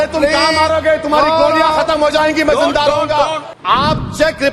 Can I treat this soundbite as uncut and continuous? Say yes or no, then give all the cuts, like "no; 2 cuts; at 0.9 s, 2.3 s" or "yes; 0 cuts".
no; 1 cut; at 3.5 s